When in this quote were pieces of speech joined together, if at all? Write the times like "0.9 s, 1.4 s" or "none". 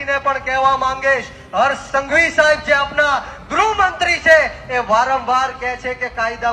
none

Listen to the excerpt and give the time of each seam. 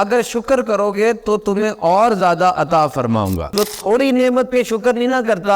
3.4 s

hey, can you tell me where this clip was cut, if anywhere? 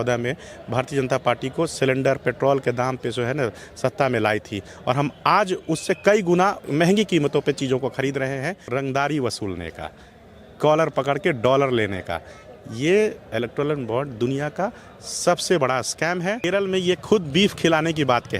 6.6 s, 8.6 s, 16.4 s

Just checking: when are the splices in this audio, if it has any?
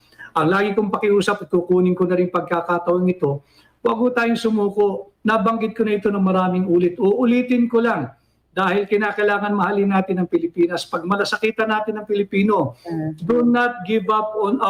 none

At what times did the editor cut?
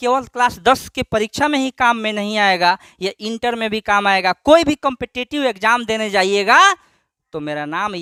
none

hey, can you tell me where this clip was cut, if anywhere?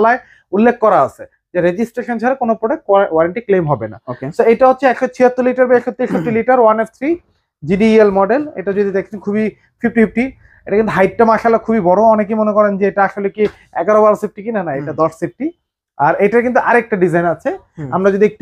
none

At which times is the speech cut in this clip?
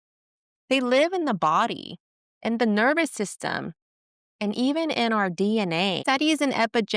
6.0 s

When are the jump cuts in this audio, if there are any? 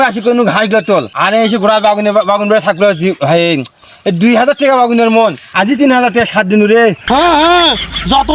1.1 s, 7.0 s

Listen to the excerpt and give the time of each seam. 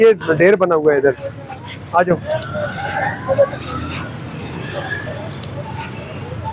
none

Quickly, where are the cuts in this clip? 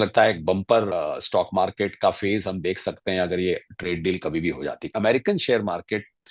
0.9 s, 4.9 s

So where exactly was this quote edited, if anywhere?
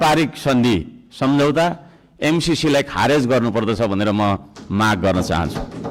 none

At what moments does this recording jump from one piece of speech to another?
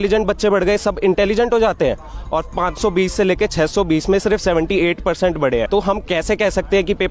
5.7 s

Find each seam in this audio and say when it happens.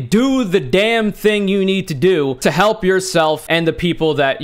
2.3 s, 3.4 s

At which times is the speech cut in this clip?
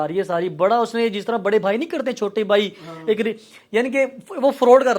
none

